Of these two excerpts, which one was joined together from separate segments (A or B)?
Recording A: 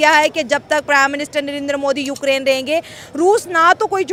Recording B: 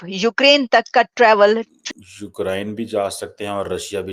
B